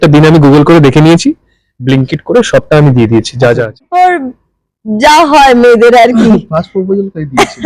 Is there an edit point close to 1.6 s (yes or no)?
no